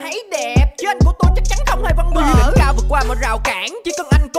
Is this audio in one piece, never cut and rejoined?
no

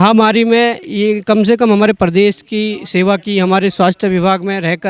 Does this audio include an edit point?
no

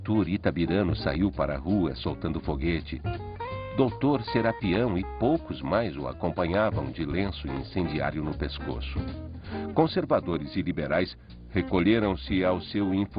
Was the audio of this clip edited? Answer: no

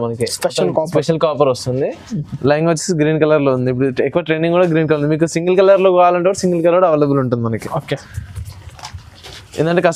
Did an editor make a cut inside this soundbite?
no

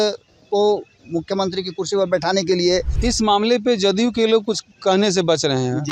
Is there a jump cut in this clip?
yes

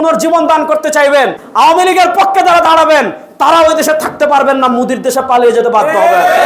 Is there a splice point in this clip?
yes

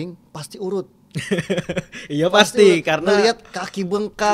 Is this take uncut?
yes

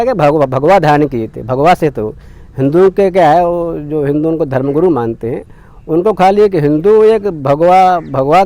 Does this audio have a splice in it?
no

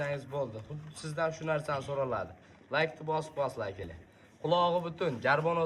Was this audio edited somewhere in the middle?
no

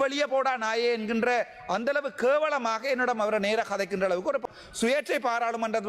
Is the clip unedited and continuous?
no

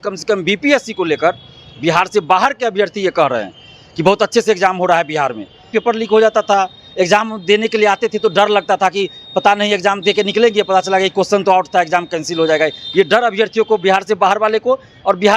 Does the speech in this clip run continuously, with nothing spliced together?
no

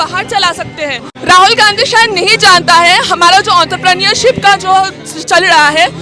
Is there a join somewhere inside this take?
yes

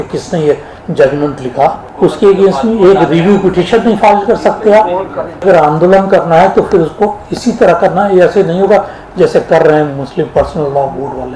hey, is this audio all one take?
no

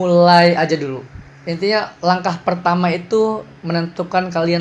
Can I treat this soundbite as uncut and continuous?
yes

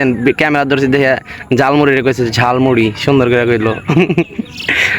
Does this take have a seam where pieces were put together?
no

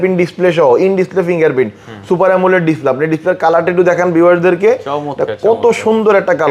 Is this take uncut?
yes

